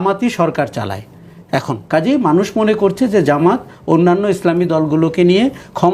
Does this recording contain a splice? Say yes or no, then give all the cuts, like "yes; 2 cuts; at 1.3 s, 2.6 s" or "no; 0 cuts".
yes; 1 cut; at 1.8 s